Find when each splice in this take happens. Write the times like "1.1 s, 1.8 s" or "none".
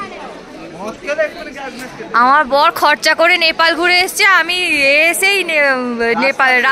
none